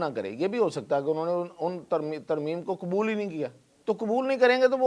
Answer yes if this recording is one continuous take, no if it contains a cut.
no